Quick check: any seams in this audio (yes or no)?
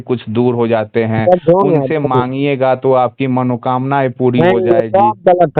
no